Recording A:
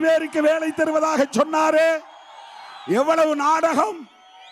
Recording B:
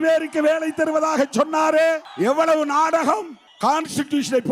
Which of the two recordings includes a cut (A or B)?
B